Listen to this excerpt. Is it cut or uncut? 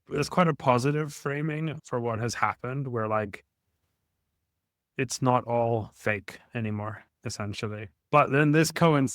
cut